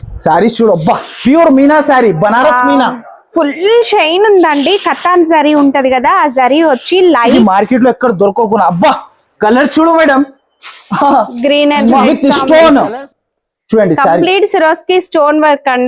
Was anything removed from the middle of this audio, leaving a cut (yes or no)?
yes